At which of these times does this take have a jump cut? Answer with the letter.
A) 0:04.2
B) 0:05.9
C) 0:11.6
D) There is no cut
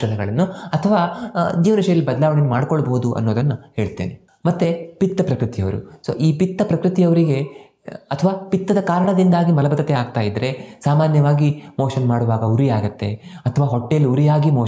A